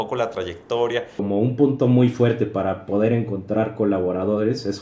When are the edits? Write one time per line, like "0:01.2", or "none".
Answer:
0:01.2